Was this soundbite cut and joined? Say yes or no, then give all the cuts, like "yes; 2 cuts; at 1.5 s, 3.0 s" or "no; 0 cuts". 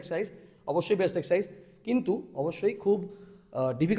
no; 0 cuts